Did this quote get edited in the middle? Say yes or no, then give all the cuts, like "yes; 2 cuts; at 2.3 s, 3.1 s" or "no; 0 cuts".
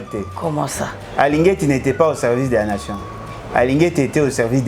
no; 0 cuts